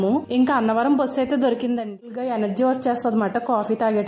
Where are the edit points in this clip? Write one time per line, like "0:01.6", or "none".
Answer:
0:02.1